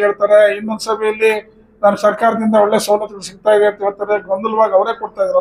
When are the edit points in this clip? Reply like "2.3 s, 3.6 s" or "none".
none